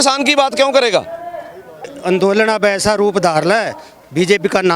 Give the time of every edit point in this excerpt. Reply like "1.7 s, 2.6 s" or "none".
1.9 s

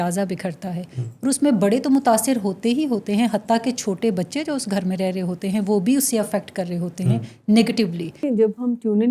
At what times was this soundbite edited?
8.2 s

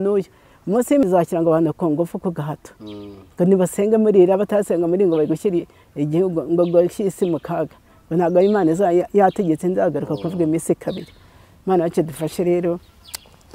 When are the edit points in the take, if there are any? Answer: 1.0 s

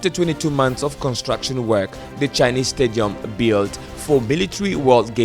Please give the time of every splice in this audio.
none

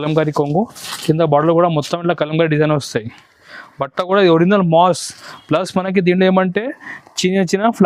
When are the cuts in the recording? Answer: none

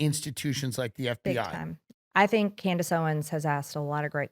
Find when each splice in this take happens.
1.8 s

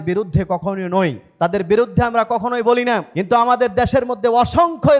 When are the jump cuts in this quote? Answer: 1.2 s, 3.1 s

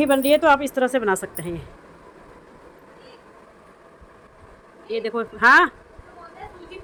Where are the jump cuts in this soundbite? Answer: none

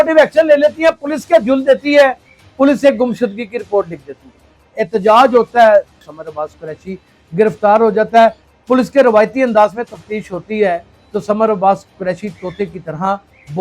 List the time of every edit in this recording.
4.8 s, 6.0 s, 8.5 s

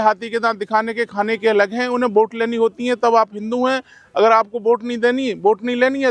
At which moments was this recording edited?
none

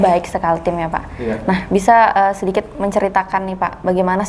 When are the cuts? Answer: none

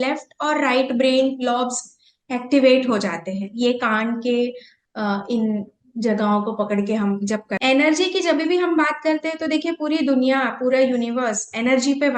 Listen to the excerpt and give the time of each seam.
7.5 s

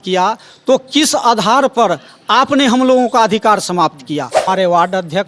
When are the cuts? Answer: 4.4 s

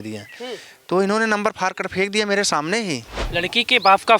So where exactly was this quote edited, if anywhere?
3.2 s

